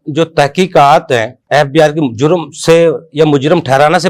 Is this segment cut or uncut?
uncut